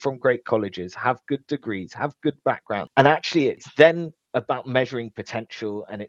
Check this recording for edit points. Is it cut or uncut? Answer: cut